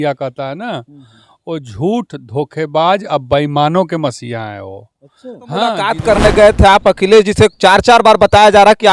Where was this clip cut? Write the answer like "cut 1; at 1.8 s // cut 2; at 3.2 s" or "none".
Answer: cut 1; at 5.9 s